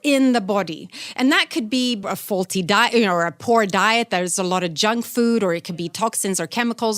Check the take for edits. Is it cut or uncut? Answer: cut